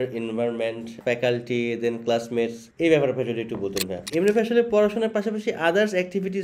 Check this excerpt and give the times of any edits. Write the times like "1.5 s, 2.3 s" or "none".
0.9 s, 2.6 s, 4.0 s